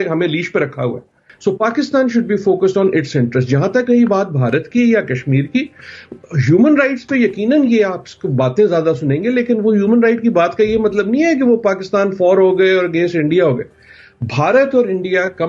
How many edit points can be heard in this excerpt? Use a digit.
1